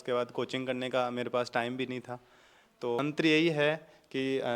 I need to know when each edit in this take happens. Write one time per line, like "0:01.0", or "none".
0:03.0